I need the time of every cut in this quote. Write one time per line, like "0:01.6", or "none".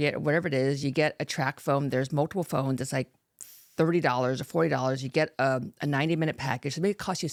none